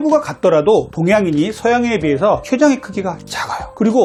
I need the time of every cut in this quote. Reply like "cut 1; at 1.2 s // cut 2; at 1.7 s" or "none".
none

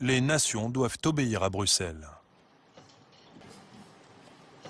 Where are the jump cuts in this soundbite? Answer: cut 1; at 3.4 s

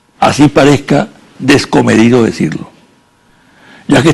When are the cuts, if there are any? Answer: cut 1; at 1.0 s

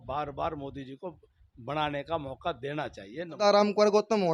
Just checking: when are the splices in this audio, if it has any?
cut 1; at 3.4 s

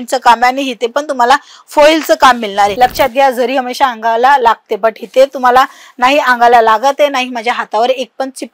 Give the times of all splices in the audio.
cut 1; at 2.7 s

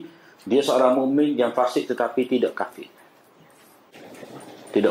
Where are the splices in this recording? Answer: cut 1; at 3.9 s

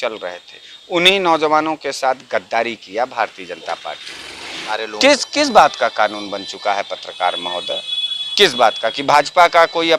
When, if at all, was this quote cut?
cut 1; at 4.7 s

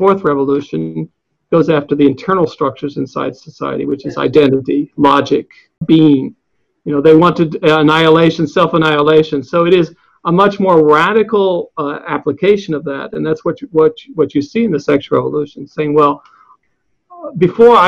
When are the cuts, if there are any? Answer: cut 1; at 5.8 s // cut 2; at 16.6 s

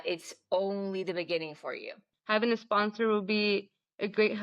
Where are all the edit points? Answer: cut 1; at 2.0 s

